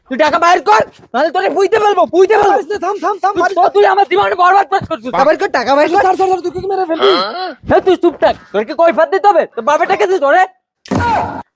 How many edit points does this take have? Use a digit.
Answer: 0